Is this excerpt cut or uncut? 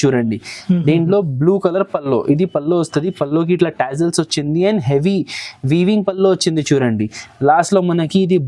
uncut